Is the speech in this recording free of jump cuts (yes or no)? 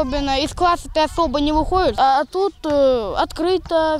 no